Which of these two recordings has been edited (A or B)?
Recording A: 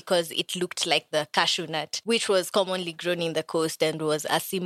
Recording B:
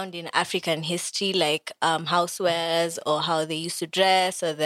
A